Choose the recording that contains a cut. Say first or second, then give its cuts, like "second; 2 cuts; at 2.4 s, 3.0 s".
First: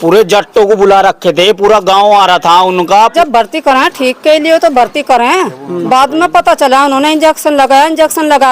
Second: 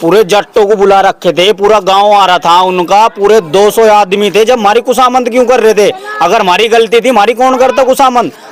first; 1 cut; at 3.1 s